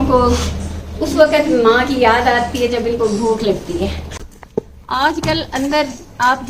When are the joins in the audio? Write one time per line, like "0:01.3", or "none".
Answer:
none